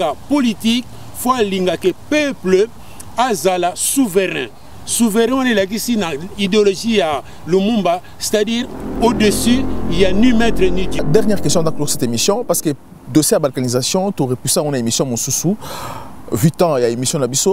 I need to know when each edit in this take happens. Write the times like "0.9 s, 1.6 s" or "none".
11.0 s